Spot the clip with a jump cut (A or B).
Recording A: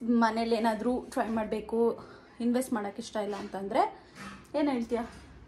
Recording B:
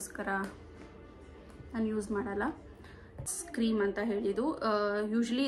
B